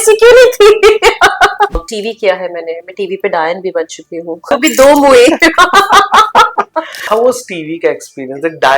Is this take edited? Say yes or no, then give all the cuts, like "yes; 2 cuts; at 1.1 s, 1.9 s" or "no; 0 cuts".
yes; 3 cuts; at 1.8 s, 4.5 s, 7.0 s